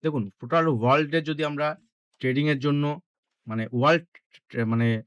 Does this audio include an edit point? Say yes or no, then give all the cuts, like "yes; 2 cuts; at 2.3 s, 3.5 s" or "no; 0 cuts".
no; 0 cuts